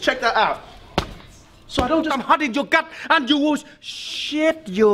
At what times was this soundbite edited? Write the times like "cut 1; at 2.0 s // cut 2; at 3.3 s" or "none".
cut 1; at 2.1 s